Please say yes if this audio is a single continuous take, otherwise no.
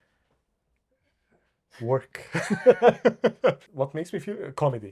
no